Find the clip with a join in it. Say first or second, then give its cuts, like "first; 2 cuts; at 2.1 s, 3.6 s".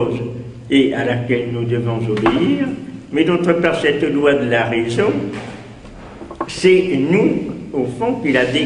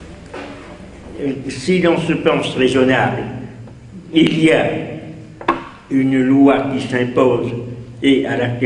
first; 1 cut; at 2.9 s